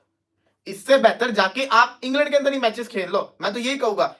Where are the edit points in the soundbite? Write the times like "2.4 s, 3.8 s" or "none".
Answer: none

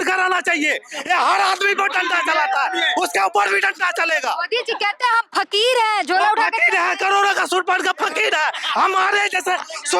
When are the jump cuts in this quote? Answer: none

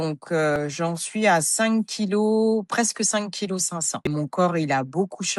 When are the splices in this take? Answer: 4.0 s

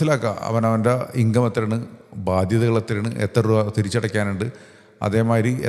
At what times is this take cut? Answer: none

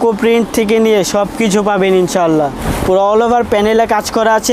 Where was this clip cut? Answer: 2.7 s

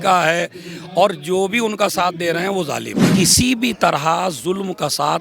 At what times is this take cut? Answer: 3.0 s

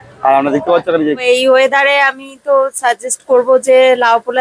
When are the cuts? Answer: 1.2 s

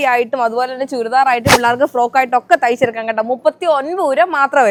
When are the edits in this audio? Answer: none

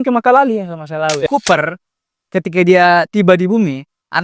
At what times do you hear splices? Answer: 1.3 s

